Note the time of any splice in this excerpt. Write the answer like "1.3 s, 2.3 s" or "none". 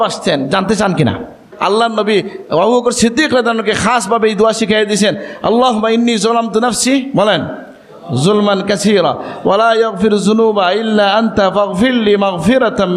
1.5 s